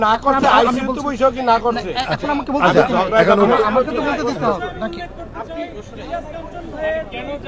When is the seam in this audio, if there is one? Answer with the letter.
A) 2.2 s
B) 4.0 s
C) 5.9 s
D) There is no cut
D